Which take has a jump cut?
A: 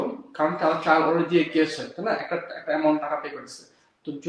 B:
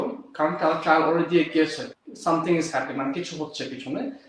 B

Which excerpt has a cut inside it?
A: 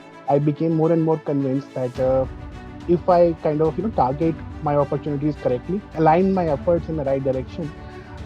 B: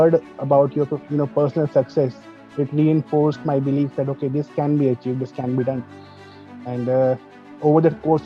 A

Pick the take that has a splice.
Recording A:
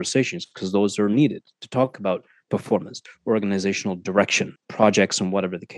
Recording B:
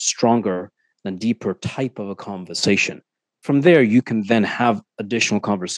A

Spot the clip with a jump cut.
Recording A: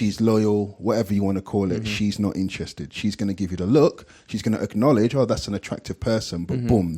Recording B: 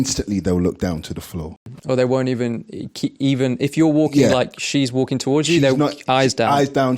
B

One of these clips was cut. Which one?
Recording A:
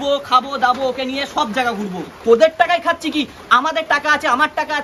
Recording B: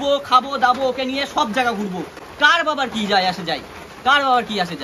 A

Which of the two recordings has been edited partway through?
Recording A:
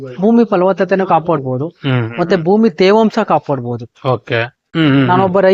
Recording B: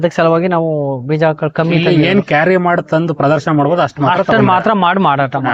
A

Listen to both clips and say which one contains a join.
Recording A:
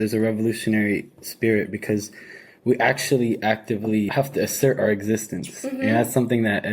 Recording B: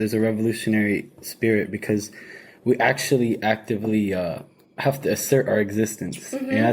A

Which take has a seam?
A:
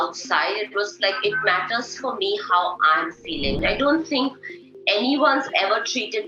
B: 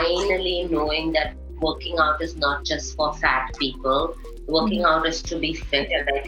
A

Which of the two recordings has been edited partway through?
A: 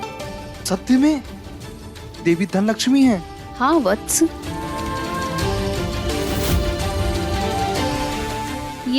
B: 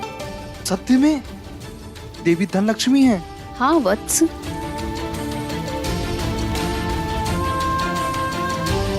A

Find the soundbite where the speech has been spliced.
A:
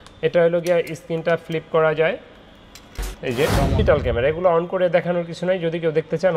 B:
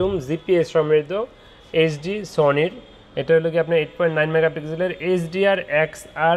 A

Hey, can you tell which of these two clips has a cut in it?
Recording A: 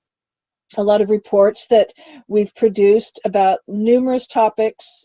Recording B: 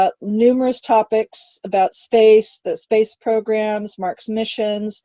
B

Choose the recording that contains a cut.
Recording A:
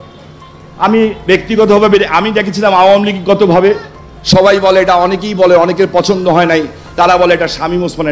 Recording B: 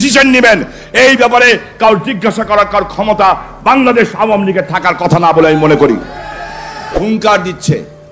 B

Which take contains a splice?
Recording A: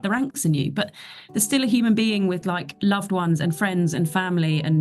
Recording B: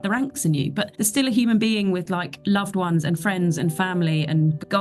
B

